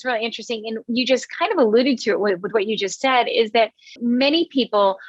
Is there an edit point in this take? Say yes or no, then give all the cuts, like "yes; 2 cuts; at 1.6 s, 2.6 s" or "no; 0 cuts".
yes; 1 cut; at 3.9 s